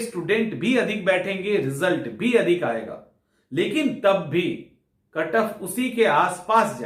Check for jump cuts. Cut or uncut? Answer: uncut